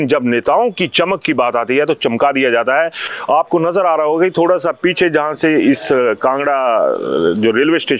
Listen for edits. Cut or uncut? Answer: uncut